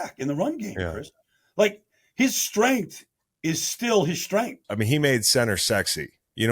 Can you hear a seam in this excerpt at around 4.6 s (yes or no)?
yes